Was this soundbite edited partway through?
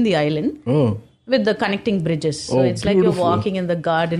no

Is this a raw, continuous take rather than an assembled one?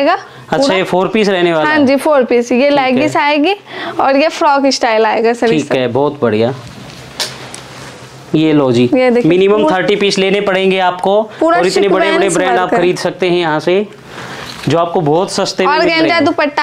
yes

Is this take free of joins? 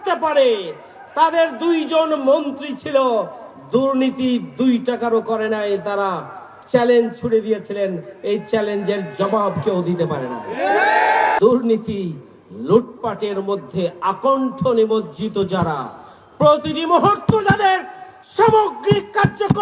no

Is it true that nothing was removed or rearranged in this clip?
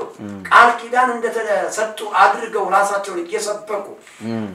yes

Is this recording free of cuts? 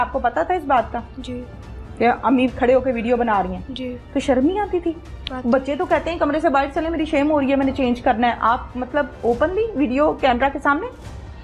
yes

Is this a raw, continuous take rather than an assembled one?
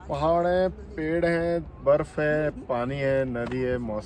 yes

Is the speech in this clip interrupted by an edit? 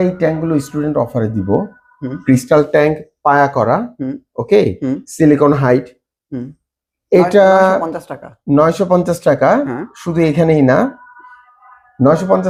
no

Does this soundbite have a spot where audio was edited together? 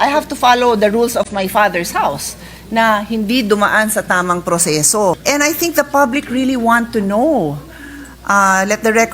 yes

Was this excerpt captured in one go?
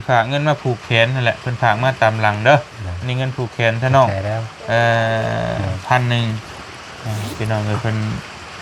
yes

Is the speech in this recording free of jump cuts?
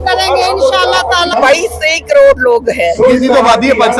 no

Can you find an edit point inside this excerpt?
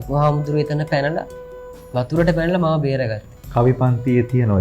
no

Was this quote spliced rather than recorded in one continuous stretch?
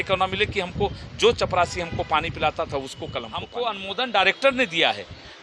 yes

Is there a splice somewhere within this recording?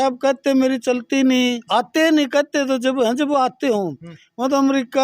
yes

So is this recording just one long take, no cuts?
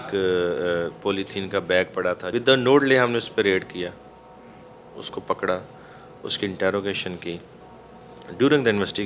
no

